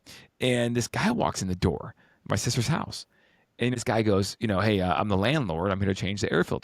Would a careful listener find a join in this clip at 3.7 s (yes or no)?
yes